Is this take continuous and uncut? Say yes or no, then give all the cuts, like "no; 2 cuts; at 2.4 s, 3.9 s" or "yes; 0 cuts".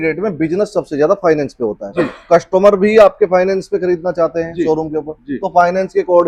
yes; 0 cuts